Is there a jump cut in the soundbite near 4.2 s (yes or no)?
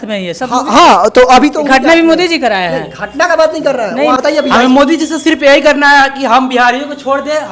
yes